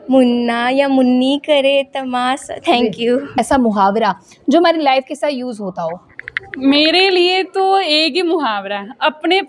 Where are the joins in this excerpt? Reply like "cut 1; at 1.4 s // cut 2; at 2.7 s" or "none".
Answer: cut 1; at 3.4 s